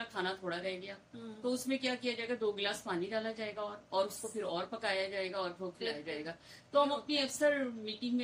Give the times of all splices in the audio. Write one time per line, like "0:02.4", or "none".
none